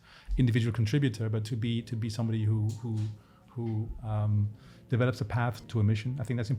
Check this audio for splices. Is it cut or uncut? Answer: cut